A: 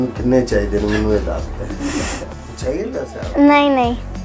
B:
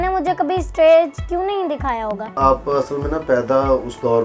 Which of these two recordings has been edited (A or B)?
B